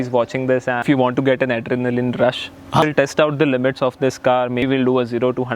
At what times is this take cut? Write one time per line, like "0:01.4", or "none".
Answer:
0:00.8
0:02.8
0:04.6